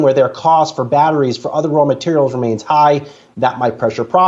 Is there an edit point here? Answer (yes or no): no